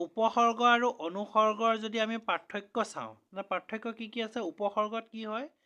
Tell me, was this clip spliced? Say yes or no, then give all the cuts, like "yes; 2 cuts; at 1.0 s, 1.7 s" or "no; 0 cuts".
no; 0 cuts